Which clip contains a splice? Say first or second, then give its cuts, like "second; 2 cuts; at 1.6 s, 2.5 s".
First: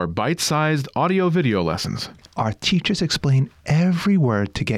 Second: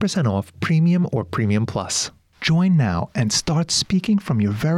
second; 1 cut; at 2.0 s